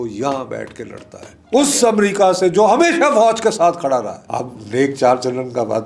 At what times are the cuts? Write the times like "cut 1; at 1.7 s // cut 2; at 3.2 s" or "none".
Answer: cut 1; at 1.3 s // cut 2; at 4.2 s